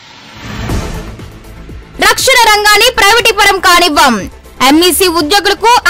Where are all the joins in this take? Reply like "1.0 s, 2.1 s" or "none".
1.1 s